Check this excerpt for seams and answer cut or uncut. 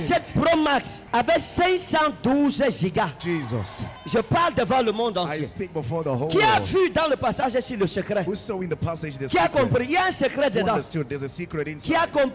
uncut